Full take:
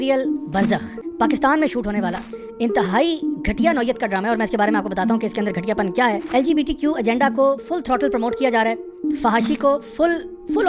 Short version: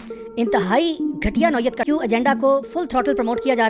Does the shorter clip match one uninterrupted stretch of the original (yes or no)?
no